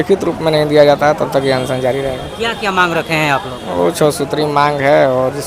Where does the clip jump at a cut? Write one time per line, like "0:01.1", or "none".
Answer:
none